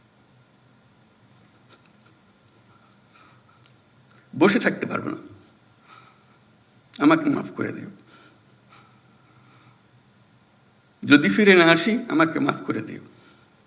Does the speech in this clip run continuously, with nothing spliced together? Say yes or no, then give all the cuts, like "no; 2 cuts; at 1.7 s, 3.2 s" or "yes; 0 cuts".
yes; 0 cuts